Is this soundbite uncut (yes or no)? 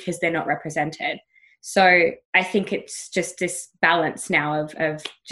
yes